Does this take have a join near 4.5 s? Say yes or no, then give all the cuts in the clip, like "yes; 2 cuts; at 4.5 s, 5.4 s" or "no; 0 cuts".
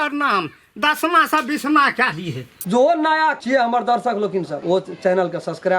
yes; 3 cuts; at 2.6 s, 3.4 s, 4.5 s